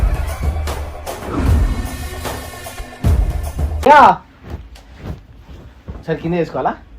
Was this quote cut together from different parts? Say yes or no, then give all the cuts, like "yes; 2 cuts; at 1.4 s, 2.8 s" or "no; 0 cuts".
yes; 1 cut; at 3.9 s